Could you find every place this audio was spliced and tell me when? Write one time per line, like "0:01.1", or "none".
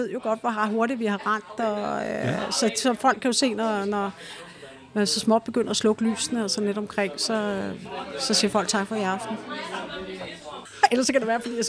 0:10.6